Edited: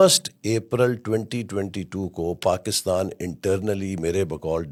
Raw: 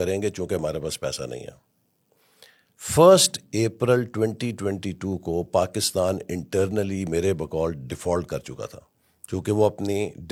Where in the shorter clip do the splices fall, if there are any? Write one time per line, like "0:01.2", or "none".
none